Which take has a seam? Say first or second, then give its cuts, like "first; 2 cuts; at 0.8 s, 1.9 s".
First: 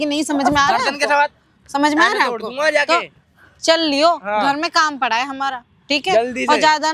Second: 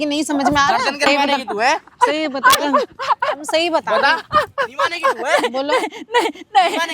second; 1 cut; at 1.1 s